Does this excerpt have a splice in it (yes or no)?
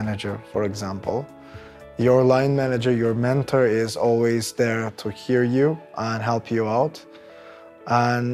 no